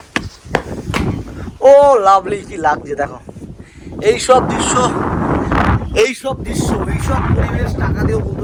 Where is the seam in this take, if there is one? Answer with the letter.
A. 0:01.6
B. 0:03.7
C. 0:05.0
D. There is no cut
D